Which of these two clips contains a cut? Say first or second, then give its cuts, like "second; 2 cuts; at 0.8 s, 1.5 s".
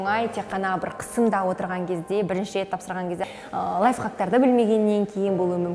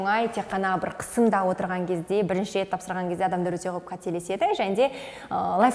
first; 1 cut; at 3.2 s